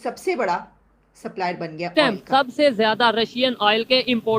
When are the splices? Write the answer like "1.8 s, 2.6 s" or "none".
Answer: 1.9 s